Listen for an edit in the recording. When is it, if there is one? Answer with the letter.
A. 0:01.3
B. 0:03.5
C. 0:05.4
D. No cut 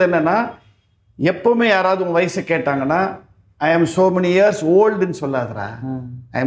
D